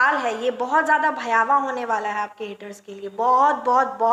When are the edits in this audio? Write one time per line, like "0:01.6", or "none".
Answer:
none